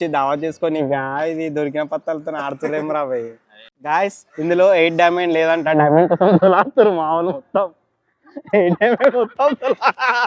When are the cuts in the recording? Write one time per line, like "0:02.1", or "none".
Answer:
0:03.7